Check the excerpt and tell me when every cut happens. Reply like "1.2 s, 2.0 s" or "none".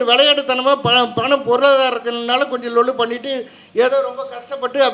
none